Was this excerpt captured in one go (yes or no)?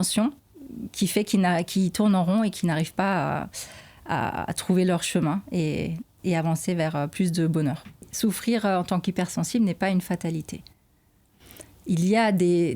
no